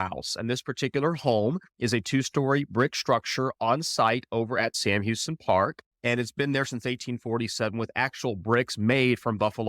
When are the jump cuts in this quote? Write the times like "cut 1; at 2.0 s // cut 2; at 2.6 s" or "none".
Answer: cut 1; at 4.7 s

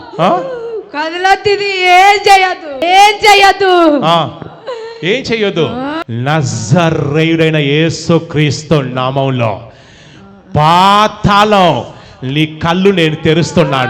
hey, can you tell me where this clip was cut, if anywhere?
cut 1; at 2.8 s // cut 2; at 6.0 s

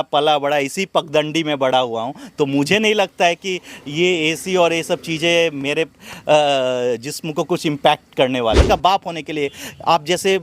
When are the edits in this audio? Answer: cut 1; at 8.7 s

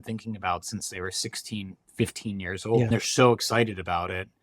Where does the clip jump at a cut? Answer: cut 1; at 2.9 s

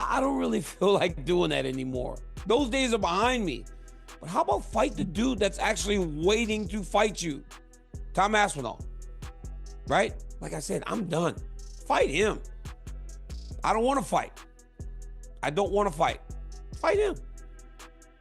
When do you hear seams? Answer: cut 1; at 10.3 s // cut 2; at 17.3 s

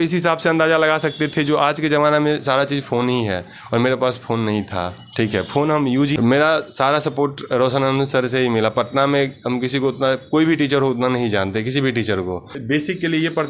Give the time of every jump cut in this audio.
cut 1; at 6.2 s // cut 2; at 12.6 s

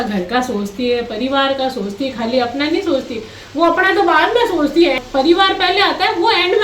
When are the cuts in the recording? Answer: cut 1; at 5.0 s

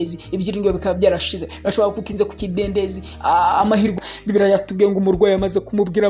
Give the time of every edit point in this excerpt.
cut 1; at 3.9 s

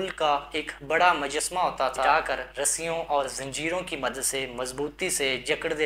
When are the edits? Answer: cut 1; at 2.1 s

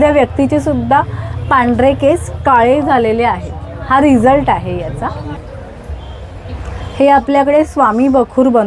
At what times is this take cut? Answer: cut 1; at 5.4 s

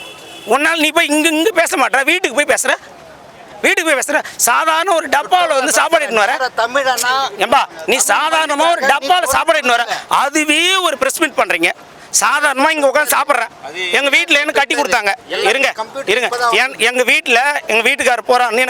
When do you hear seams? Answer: none

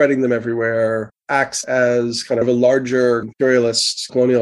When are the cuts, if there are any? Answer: cut 1; at 1.1 s

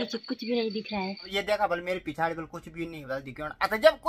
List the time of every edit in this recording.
cut 1; at 1.2 s

